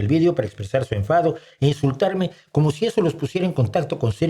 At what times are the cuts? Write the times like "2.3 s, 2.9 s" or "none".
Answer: none